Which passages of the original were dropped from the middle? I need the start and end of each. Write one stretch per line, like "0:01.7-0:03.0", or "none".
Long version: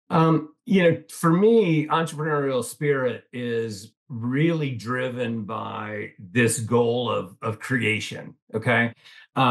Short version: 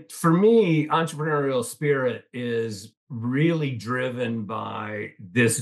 none